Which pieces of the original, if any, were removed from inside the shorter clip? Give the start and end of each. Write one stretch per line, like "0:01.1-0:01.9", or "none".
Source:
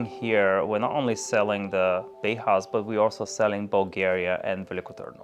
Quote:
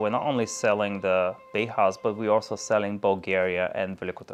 none